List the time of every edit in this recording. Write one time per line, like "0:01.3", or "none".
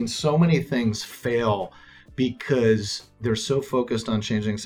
none

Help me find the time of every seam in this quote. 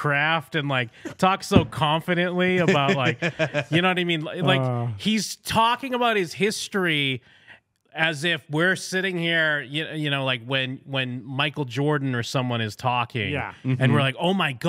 none

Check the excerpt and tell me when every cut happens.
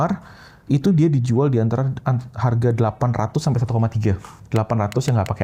none

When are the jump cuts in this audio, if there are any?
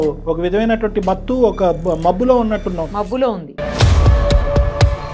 none

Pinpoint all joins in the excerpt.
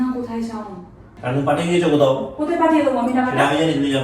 0:01.2

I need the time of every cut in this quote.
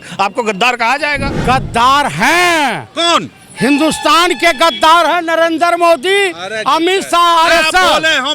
0:01.3

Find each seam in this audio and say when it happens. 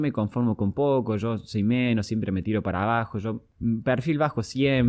0:03.5

